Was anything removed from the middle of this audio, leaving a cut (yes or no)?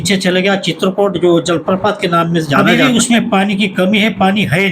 yes